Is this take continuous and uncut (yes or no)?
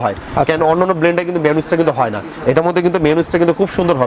yes